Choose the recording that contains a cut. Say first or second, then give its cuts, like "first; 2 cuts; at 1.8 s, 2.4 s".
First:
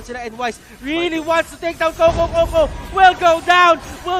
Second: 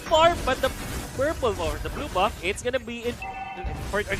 second; 1 cut; at 3.2 s